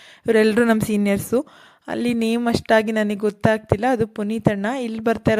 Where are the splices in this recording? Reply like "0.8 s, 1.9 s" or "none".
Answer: none